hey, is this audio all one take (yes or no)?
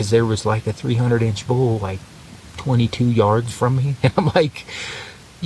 yes